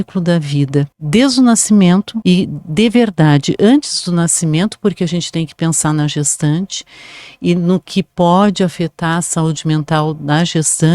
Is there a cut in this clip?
yes; 2 cuts; at 1.0 s, 2.1 s

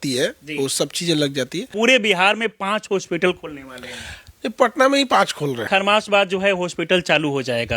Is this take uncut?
no; 2 cuts; at 1.7 s, 5.6 s

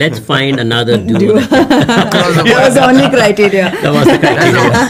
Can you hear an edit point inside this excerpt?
no; 0 cuts

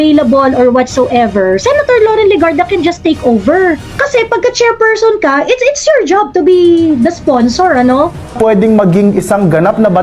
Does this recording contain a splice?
yes; 2 cuts; at 3.9 s, 8.3 s

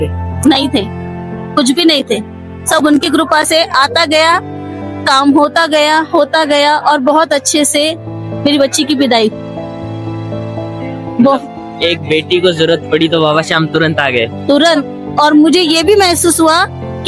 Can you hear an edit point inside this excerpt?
no; 0 cuts

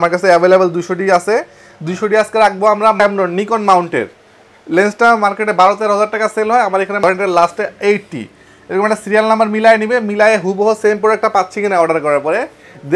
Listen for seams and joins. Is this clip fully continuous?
no; 2 cuts; at 3.0 s, 7.0 s

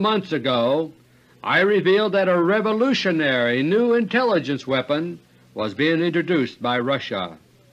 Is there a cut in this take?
no; 0 cuts

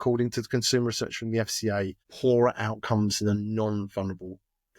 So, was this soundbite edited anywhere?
yes; 1 cut; at 2.0 s

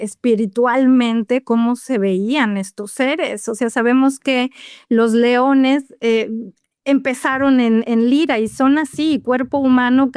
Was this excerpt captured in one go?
yes; 0 cuts

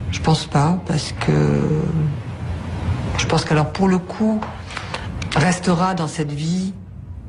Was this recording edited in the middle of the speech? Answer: no; 0 cuts

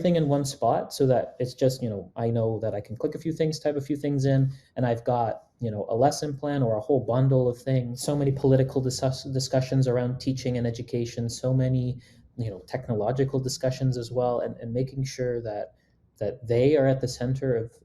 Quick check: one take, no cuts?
no; 1 cut; at 7.9 s

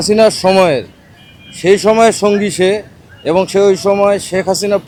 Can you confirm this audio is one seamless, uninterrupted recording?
yes; 0 cuts

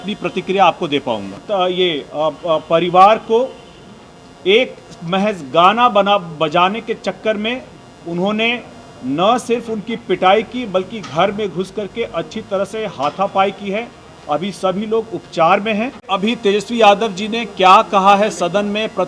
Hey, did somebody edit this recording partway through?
yes; 2 cuts; at 1.4 s, 16.0 s

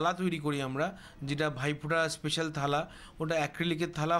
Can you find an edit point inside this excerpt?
no; 0 cuts

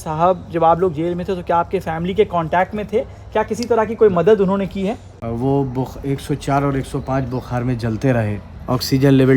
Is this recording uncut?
no; 2 cuts; at 5.1 s, 8.5 s

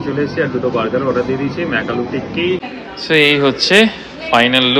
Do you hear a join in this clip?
yes; 1 cut; at 2.7 s

